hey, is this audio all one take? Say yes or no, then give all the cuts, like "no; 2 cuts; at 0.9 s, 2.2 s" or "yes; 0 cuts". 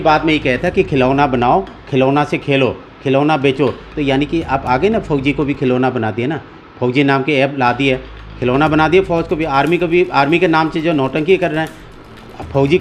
yes; 0 cuts